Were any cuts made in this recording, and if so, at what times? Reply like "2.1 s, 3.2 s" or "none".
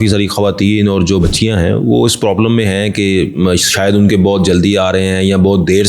1.2 s